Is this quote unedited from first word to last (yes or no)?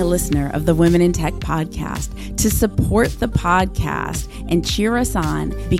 yes